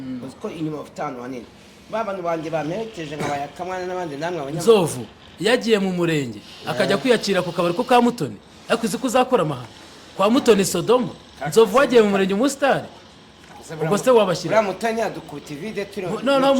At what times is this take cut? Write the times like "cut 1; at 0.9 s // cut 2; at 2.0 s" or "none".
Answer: none